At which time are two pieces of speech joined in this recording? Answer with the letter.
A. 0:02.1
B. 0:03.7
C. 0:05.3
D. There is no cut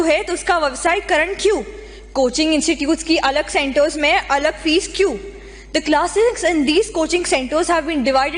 D